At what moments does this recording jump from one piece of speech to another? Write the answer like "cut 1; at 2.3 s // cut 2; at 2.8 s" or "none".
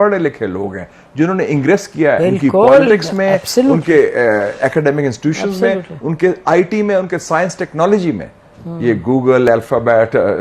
cut 1; at 2.2 s